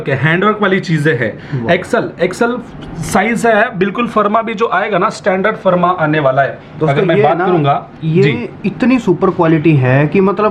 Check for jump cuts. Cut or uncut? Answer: uncut